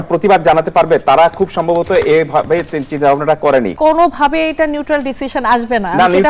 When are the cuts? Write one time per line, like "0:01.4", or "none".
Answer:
0:03.7